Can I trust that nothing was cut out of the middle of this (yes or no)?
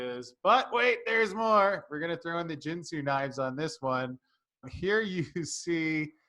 no